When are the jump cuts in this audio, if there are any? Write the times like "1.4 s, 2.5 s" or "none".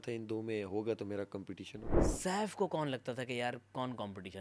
2.0 s